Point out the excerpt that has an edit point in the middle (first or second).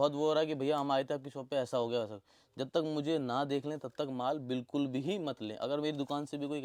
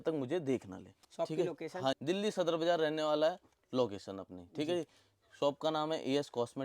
second